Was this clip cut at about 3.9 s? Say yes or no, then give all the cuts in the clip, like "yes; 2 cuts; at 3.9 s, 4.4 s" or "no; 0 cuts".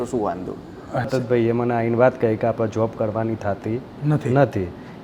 no; 1 cut; at 1.1 s